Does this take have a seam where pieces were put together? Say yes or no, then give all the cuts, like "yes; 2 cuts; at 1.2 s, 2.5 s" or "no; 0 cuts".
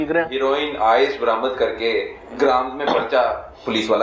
no; 0 cuts